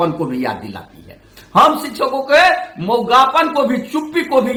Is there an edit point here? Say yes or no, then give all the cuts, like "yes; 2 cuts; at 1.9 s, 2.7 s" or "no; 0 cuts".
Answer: no; 0 cuts